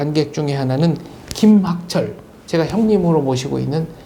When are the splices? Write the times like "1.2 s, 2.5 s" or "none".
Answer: none